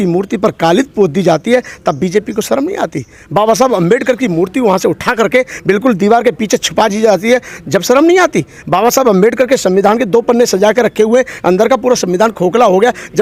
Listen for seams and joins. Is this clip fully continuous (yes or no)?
yes